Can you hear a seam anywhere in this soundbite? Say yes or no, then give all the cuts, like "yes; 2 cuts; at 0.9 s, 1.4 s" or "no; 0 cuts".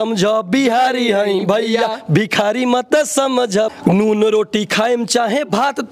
yes; 1 cut; at 3.7 s